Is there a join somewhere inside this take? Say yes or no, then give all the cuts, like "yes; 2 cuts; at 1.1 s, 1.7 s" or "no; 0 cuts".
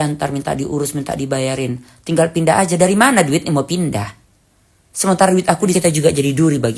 yes; 1 cut; at 5.7 s